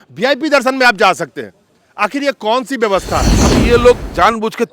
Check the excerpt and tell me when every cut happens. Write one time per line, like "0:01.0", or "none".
0:03.4